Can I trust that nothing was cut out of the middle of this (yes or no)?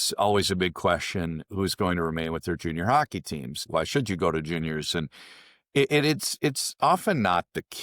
no